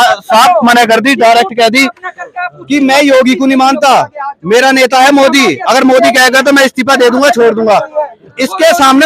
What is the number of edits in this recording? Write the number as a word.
zero